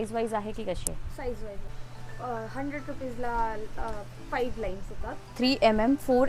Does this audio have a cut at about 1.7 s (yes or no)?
yes